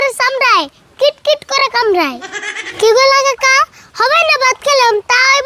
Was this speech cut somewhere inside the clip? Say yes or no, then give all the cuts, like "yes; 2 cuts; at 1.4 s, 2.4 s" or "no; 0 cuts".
yes; 1 cut; at 2.6 s